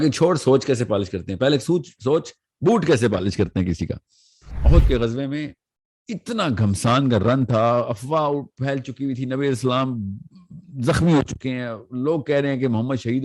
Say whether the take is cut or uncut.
cut